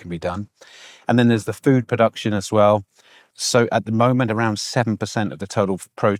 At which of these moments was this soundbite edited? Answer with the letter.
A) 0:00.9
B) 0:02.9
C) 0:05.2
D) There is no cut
D